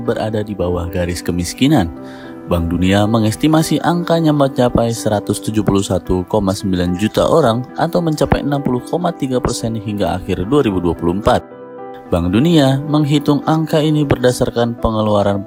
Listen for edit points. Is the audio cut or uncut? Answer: uncut